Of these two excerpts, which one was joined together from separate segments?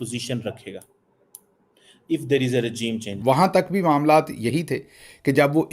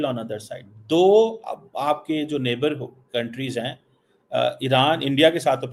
first; 1 cut; at 3.1 s

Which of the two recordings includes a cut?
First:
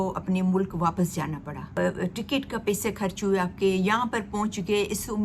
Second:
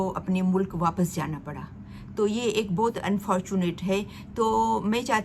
first; 1 cut; at 1.7 s

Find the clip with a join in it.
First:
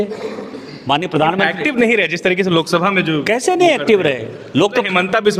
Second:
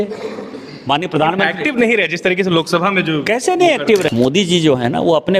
second; 1 cut; at 4.1 s

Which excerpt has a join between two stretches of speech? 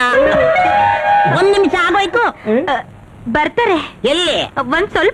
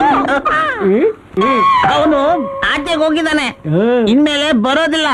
second; 1 cut; at 1.3 s

